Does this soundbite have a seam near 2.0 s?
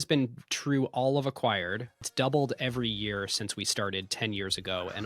yes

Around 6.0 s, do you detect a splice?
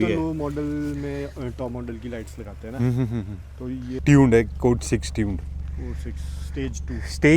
no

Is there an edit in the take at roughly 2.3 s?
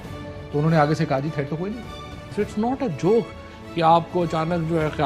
yes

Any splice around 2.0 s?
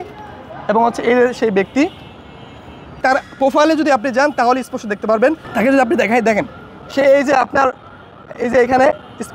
no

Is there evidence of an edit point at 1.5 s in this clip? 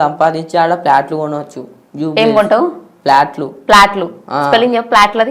no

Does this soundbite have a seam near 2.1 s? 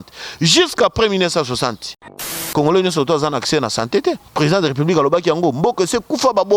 yes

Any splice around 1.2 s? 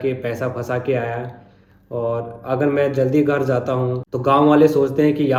no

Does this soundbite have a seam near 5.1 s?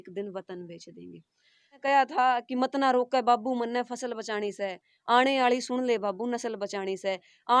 no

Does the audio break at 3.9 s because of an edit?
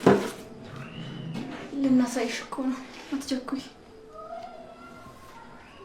yes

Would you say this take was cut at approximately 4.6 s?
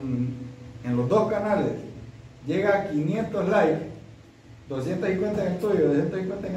no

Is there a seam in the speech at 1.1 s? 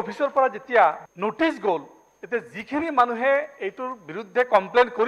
yes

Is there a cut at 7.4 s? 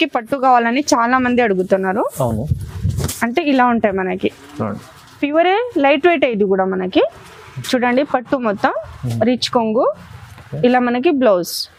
no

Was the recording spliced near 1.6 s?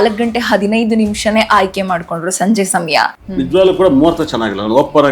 no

